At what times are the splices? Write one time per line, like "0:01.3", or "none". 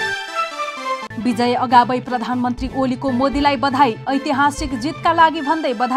0:01.1